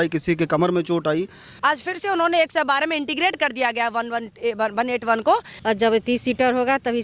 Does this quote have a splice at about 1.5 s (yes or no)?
yes